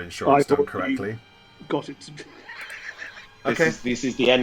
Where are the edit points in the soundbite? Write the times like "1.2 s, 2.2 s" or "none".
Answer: 3.4 s